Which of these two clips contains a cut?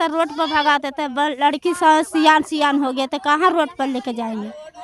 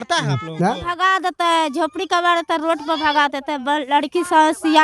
second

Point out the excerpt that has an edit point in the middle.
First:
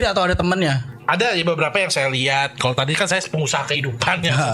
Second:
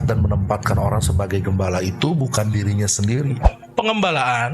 second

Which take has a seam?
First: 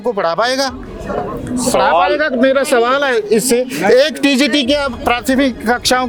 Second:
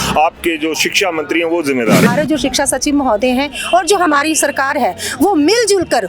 second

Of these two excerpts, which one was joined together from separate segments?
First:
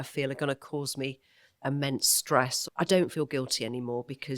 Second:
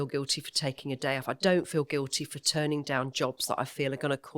first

